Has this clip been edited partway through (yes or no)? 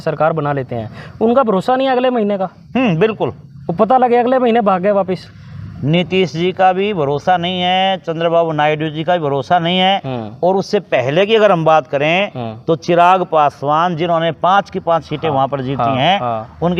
no